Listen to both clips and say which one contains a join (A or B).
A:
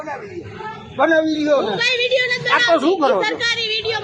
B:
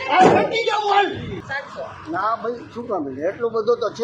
B